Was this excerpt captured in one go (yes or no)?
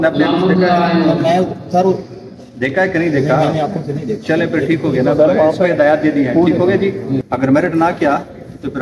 no